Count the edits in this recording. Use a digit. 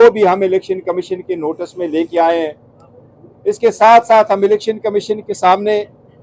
0